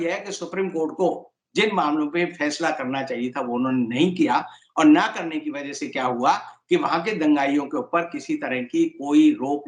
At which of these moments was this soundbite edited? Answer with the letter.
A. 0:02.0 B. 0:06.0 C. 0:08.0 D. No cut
D